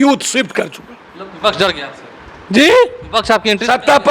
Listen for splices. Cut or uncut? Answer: uncut